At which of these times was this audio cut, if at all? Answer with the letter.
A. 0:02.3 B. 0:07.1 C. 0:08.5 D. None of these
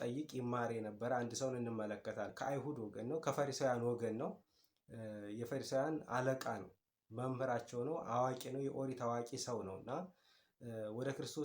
A